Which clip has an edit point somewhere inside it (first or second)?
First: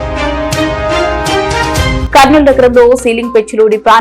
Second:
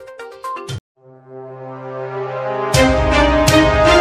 first